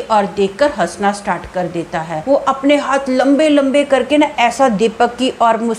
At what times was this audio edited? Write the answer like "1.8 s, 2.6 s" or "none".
2.1 s